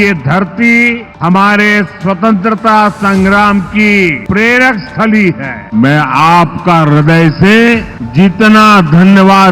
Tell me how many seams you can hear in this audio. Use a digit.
4